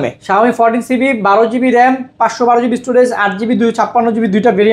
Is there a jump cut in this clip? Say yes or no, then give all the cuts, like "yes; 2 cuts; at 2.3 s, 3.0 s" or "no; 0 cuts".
no; 0 cuts